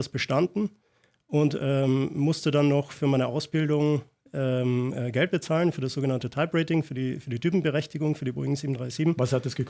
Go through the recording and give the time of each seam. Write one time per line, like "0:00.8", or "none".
none